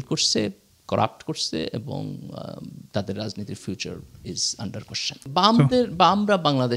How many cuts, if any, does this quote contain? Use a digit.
1